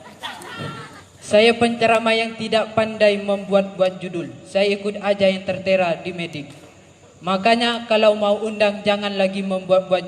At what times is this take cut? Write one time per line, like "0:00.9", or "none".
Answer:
0:01.1